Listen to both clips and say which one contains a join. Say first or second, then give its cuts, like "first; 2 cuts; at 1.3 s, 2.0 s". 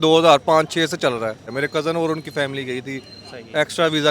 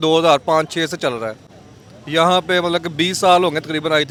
first; 1 cut; at 1.5 s